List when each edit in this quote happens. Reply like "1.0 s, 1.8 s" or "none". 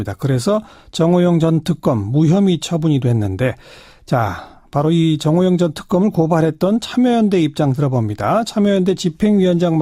5.6 s